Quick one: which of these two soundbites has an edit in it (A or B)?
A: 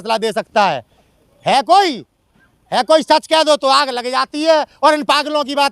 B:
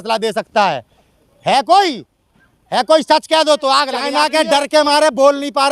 B